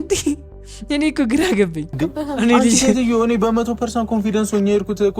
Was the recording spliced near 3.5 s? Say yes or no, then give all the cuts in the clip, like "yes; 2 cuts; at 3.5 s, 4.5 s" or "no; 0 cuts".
no; 1 cut; at 1.9 s